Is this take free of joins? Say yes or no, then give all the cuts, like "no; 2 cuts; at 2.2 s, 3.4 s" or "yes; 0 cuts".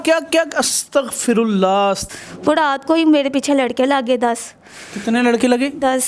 no; 1 cut; at 2.0 s